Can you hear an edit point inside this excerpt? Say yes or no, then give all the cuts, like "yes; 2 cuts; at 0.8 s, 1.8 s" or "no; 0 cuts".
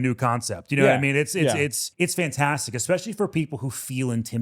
yes; 1 cut; at 1.8 s